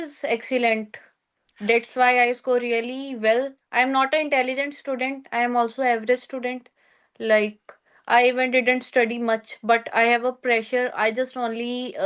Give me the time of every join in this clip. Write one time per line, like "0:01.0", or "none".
none